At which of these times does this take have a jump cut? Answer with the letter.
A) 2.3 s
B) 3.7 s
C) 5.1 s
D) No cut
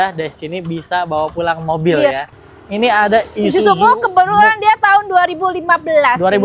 A